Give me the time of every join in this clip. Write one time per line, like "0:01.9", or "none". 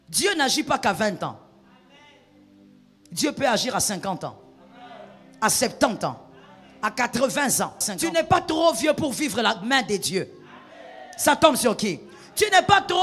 0:08.0